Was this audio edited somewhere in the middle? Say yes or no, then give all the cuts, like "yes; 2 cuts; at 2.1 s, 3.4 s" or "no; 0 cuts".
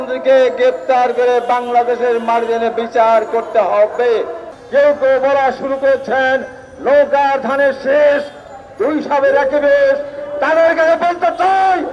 yes; 1 cut; at 4.5 s